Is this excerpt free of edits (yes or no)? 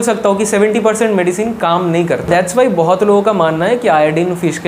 no